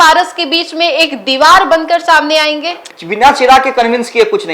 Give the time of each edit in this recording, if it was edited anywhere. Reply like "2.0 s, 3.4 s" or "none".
3.0 s